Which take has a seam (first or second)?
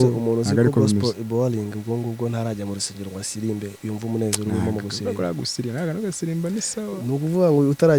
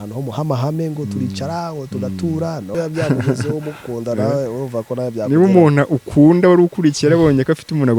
second